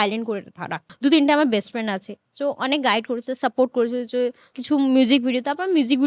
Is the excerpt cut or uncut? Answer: cut